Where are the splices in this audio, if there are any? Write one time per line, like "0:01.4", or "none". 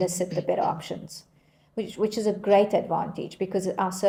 none